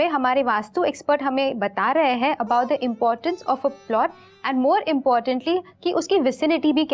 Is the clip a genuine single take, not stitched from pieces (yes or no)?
yes